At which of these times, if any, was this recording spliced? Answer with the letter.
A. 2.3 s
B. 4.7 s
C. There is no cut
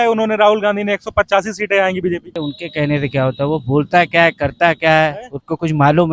A